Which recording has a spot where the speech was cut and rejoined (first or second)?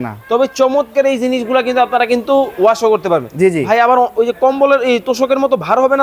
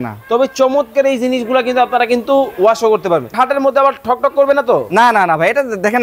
second